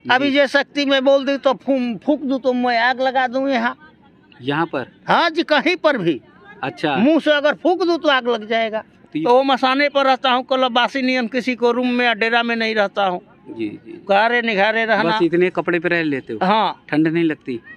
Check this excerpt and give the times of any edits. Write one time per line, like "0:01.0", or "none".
0:09.1